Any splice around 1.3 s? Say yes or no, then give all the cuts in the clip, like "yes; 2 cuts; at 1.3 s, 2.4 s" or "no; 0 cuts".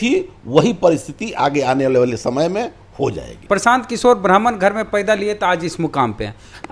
no; 1 cut; at 3.4 s